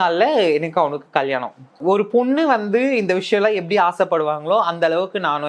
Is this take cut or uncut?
cut